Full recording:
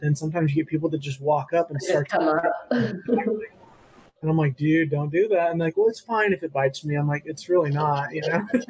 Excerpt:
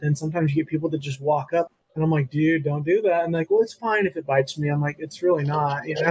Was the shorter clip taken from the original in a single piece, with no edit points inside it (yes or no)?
no